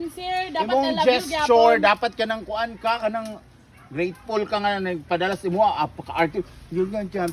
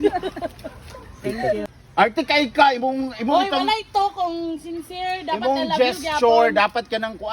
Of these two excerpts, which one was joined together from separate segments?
second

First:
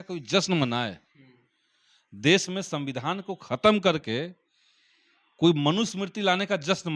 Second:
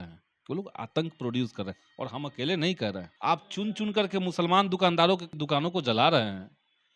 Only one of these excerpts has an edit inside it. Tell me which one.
second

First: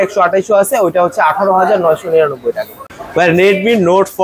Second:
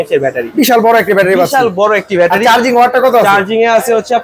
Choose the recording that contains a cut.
first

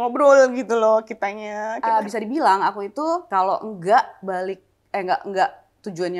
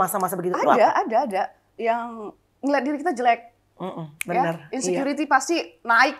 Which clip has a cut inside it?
first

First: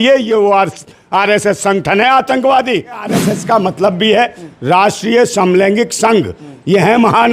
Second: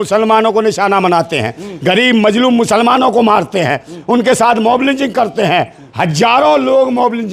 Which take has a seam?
first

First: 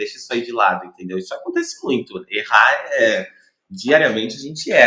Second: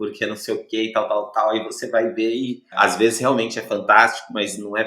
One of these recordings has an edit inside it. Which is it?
second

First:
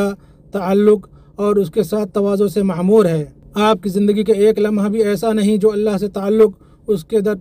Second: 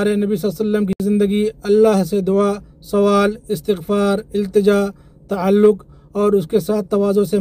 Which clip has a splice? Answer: second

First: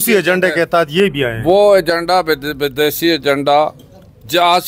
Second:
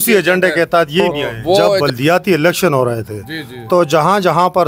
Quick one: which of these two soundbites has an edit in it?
second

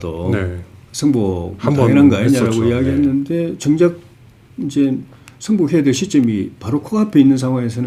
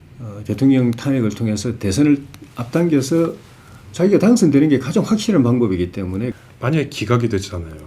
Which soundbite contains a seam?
second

